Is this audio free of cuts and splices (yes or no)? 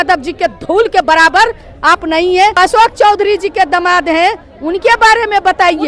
no